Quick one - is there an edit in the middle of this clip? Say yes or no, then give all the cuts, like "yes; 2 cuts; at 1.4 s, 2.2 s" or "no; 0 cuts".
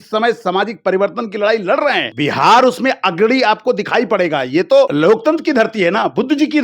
yes; 2 cuts; at 2.1 s, 4.9 s